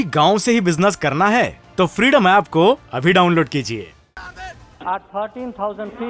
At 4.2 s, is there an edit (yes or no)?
yes